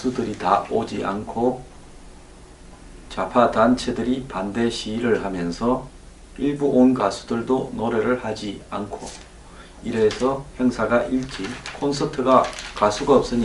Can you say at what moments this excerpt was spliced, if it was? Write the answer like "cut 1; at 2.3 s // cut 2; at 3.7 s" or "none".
cut 1; at 11.2 s